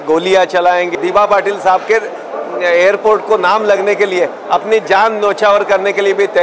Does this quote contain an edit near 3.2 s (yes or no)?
no